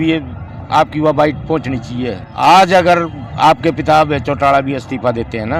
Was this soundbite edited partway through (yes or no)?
yes